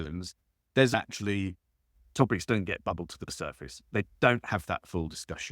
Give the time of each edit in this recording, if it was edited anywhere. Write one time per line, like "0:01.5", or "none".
0:00.9